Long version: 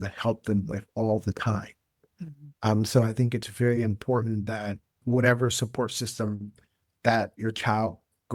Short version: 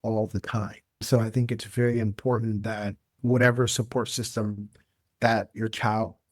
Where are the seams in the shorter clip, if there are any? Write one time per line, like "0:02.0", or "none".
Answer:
0:01.0